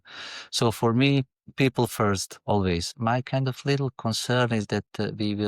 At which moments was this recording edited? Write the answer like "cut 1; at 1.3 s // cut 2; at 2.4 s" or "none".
cut 1; at 2.9 s

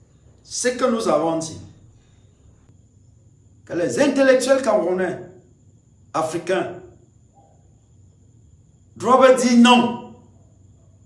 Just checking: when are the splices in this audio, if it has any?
cut 1; at 2.7 s

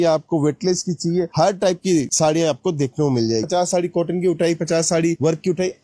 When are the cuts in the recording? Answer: cut 1; at 3.5 s

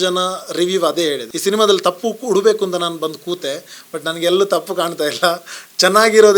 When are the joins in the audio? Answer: cut 1; at 1.3 s

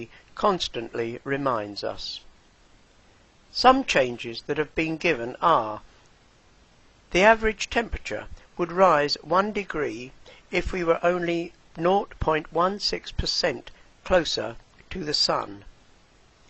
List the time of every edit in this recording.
cut 1; at 14.5 s

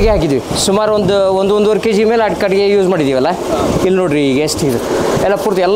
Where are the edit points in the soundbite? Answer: none

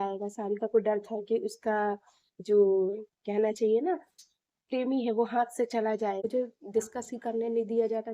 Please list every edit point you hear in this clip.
cut 1; at 6.3 s

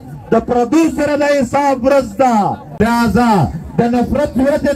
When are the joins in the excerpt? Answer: cut 1; at 2.8 s

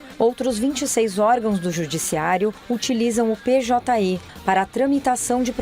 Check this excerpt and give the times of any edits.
cut 1; at 4.3 s

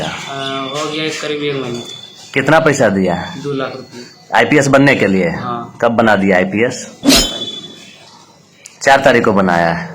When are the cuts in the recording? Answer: cut 1; at 6.9 s

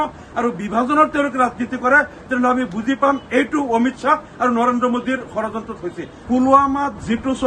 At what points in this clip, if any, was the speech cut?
cut 1; at 6.1 s

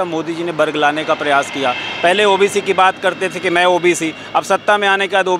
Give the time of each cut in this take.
none

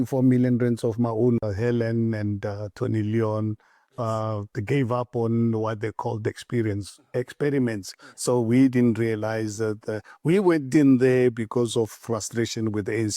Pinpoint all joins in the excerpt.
cut 1; at 1.4 s

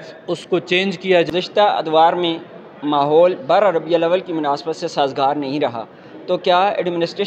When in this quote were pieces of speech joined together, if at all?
cut 1; at 1.3 s

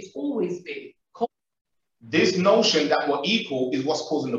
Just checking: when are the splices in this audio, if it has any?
cut 1; at 1.3 s

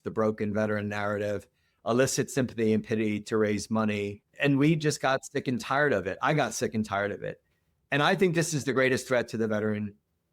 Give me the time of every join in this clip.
cut 1; at 4.2 s

